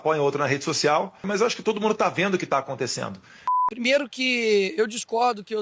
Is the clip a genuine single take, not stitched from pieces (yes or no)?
no